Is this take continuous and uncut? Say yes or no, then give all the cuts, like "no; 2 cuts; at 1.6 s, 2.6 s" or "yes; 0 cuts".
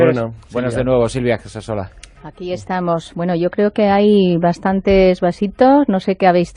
yes; 0 cuts